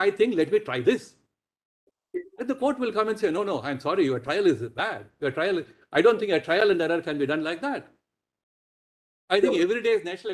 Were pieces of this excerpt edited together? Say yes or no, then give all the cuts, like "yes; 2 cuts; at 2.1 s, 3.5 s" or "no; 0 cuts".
no; 0 cuts